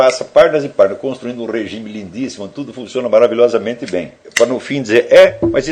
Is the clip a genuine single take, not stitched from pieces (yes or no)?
no